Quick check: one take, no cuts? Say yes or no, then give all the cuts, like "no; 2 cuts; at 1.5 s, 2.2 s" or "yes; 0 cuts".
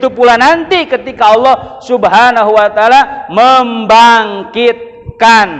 yes; 0 cuts